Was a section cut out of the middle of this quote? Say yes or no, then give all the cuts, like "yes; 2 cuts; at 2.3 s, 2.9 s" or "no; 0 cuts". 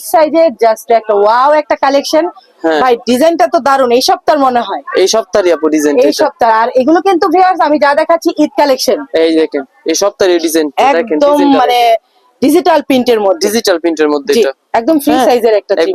no; 0 cuts